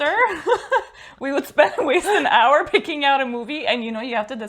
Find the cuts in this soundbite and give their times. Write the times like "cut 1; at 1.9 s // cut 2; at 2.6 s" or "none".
none